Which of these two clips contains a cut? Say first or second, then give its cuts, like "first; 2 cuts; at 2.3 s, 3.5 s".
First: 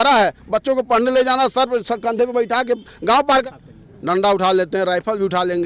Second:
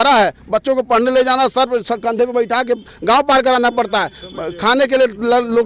first; 1 cut; at 3.4 s